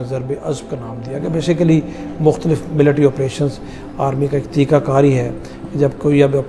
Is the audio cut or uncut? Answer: uncut